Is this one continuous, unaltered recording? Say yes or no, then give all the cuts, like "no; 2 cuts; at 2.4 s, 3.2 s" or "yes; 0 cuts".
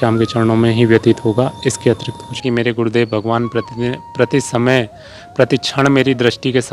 no; 1 cut; at 2.4 s